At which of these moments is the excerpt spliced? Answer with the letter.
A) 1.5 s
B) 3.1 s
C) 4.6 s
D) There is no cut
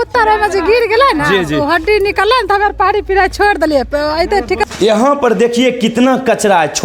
C